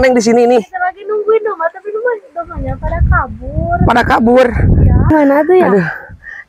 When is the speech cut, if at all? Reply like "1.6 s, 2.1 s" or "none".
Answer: 5.1 s